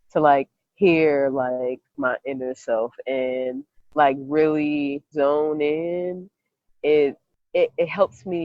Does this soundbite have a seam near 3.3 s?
no; 3 cuts; at 2.0 s, 5.1 s, 7.3 s

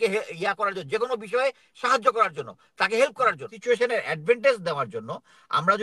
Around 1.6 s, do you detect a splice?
no; 1 cut; at 3.5 s

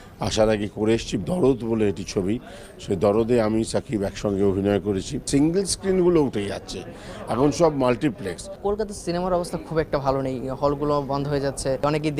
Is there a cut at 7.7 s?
no; 1 cut; at 0.9 s

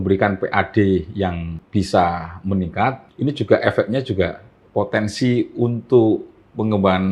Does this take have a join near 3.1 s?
yes; 2 cuts; at 1.5 s, 3.1 s

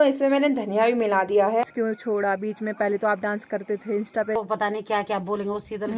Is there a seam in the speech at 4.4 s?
yes; 2 cuts; at 1.6 s, 4.4 s

